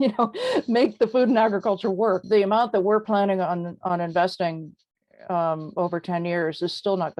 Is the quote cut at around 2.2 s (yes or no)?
yes